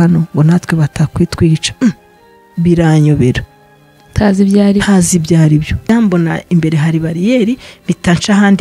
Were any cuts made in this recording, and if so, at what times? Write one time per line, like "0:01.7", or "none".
0:05.9